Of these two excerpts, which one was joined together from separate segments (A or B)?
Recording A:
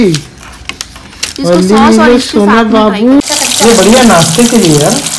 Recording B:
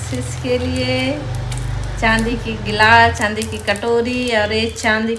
A